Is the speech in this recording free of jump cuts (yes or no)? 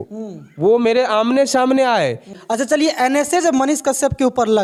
yes